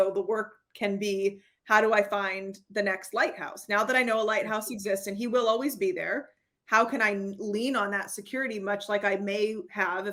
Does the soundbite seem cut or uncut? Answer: uncut